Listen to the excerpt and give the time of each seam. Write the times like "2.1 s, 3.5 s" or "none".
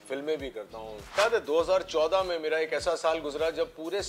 1.2 s